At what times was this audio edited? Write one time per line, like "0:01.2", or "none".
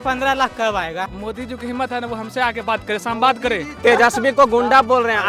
0:01.1
0:03.8